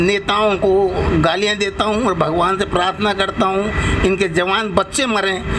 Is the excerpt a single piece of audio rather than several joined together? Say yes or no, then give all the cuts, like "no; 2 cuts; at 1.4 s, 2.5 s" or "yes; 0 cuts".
yes; 0 cuts